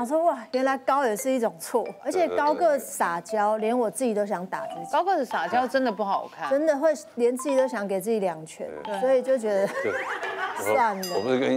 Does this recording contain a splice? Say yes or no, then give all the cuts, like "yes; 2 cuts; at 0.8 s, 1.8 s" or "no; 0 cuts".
no; 0 cuts